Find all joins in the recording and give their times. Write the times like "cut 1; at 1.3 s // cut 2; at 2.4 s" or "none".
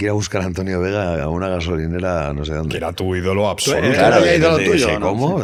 none